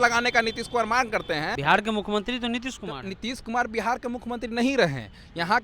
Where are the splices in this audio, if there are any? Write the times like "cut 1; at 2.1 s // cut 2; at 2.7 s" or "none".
cut 1; at 1.5 s